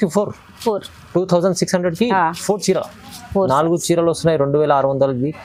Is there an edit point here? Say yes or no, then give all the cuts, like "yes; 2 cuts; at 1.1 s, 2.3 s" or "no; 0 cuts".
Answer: no; 0 cuts